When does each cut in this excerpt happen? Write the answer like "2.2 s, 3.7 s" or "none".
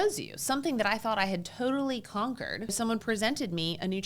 2.7 s